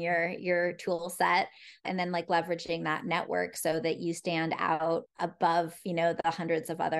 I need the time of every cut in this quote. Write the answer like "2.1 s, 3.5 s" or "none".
1.8 s, 5.1 s